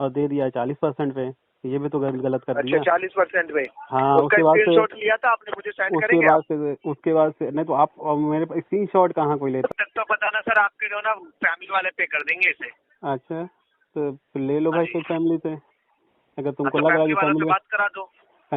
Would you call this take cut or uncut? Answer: cut